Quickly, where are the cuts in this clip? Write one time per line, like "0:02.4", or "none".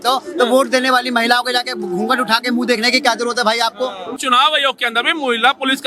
0:04.2